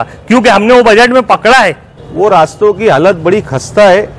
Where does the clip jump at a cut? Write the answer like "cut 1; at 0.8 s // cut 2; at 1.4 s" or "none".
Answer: cut 1; at 2.0 s